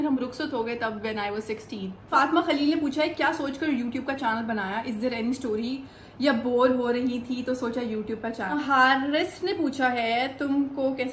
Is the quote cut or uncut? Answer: cut